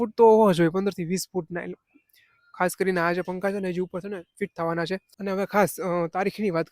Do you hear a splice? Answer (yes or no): no